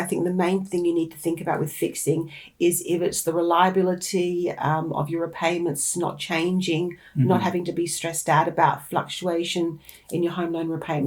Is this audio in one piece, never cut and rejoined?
yes; 0 cuts

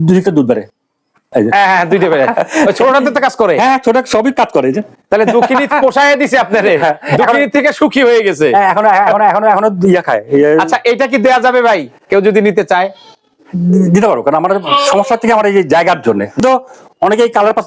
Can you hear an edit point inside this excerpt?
yes; 1 cut; at 16.4 s

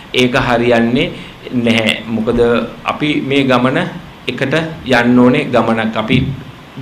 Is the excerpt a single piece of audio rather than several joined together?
yes; 0 cuts

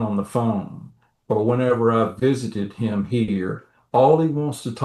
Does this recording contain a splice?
no; 0 cuts

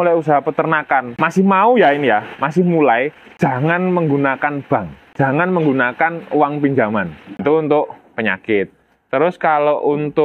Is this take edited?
yes; 4 cuts; at 1.2 s, 3.2 s, 5.0 s, 7.3 s

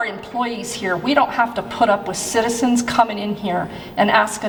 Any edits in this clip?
no; 0 cuts

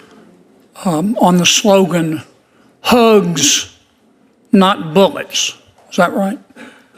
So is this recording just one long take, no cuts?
yes; 0 cuts

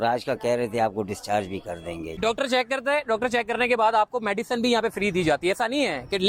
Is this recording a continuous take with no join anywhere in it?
no; 1 cut; at 2.2 s

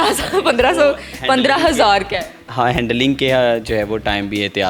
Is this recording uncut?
yes; 0 cuts

